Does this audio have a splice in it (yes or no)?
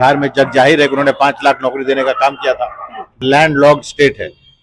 yes